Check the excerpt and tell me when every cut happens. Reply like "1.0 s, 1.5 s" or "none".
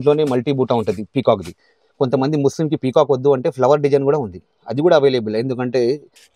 none